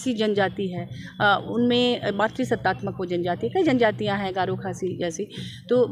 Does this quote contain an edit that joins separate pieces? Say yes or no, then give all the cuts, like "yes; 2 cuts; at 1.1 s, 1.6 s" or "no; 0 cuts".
no; 0 cuts